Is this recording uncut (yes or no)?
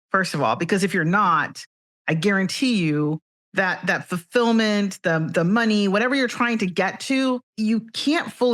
no